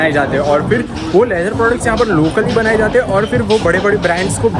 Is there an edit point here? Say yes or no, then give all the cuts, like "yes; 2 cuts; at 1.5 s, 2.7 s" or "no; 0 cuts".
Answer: no; 0 cuts